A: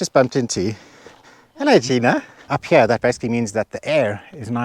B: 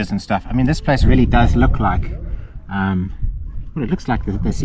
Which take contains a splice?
A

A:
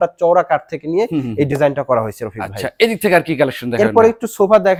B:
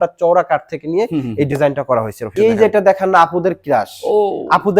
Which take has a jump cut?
B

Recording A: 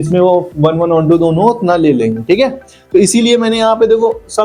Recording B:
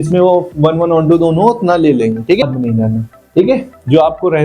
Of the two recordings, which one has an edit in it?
B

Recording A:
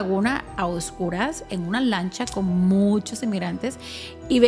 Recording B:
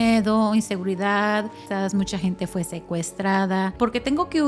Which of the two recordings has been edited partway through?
B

